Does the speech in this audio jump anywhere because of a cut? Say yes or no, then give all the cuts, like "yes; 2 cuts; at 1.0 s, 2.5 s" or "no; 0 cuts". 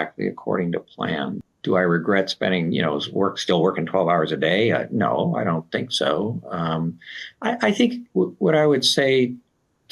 yes; 1 cut; at 1.5 s